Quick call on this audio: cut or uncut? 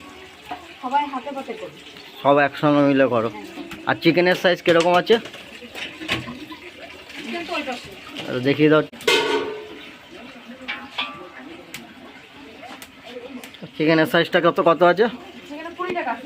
cut